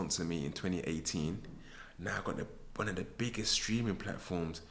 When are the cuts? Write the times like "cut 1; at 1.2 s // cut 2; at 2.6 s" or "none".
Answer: none